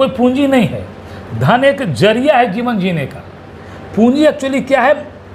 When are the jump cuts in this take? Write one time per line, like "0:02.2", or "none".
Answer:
none